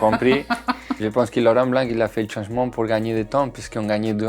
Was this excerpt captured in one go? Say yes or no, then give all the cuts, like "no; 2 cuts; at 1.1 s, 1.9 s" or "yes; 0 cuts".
no; 1 cut; at 0.9 s